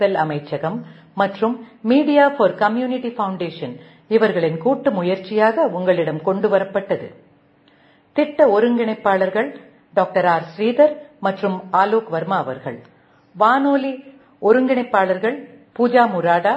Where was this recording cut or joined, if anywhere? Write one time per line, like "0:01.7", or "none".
none